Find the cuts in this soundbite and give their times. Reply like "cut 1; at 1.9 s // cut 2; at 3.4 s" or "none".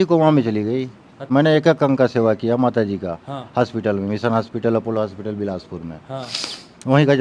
cut 1; at 1.3 s